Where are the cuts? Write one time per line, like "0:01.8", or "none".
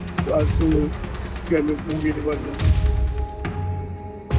0:02.8